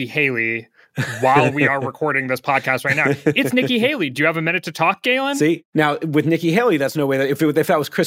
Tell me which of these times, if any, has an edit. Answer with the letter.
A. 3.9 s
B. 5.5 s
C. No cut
B